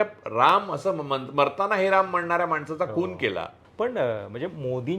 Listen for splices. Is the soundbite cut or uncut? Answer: cut